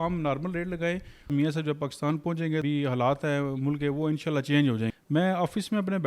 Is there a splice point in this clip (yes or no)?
yes